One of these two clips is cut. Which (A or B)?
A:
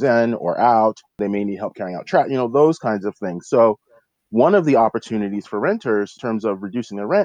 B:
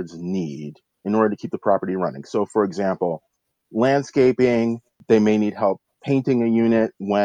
A